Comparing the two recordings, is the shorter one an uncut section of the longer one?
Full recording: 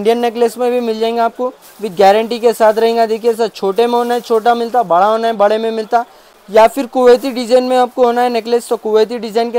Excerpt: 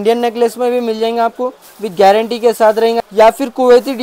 no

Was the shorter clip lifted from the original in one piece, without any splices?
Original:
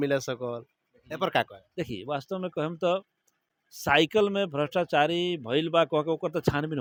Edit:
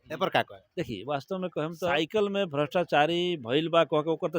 no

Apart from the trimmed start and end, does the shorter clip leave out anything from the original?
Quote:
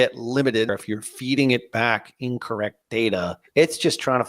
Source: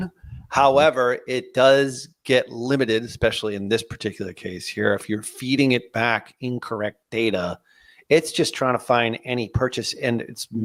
yes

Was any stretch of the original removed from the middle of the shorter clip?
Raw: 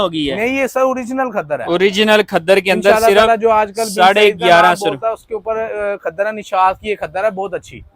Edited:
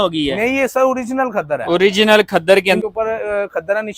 yes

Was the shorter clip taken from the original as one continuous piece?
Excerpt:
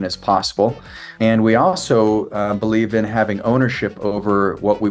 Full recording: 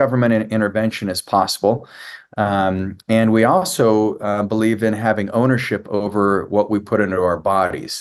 no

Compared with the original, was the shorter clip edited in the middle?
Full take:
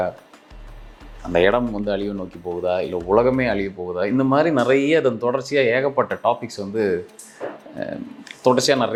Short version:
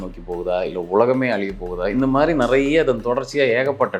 no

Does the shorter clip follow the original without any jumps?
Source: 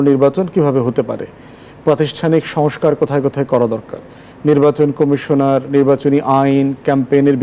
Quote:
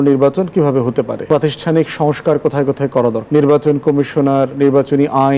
no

